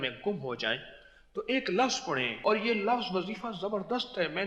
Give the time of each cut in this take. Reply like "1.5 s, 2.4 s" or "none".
2.4 s